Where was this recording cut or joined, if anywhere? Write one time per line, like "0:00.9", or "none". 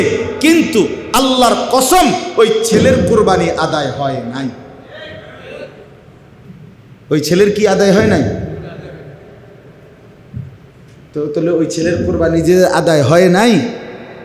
0:06.4